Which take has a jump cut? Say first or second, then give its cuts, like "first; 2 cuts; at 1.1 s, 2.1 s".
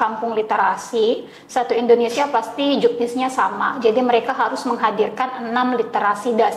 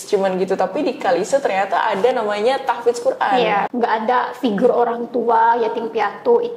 second; 1 cut; at 3.7 s